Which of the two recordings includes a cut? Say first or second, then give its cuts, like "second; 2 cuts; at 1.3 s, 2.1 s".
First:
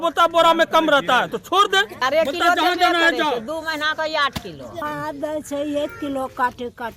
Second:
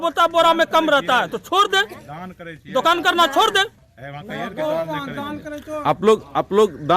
first; 2 cuts; at 1.9 s, 4.9 s